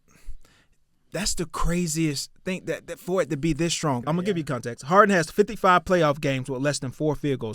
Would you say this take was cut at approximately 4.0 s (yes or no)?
yes